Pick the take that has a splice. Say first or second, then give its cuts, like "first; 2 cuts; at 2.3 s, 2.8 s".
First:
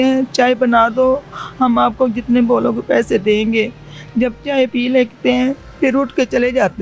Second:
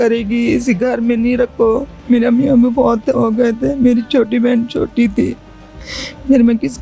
second; 1 cut; at 1.9 s